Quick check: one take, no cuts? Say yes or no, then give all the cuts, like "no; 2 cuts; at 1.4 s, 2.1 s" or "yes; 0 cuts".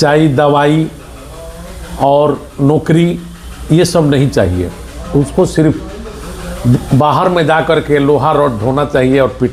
yes; 0 cuts